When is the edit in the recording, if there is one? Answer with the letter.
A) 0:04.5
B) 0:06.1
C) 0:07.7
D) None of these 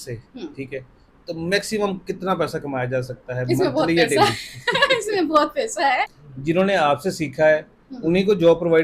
B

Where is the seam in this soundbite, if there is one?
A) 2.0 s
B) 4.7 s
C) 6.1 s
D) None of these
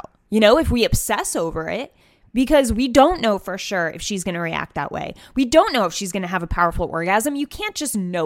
A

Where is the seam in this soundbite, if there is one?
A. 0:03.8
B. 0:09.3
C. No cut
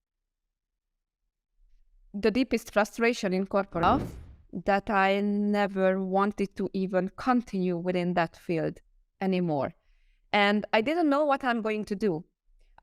A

